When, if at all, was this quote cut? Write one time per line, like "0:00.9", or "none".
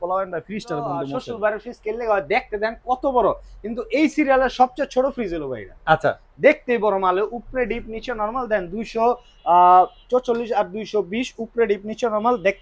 0:01.1